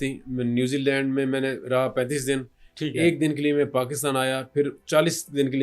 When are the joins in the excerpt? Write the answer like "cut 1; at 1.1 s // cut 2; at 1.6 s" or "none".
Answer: none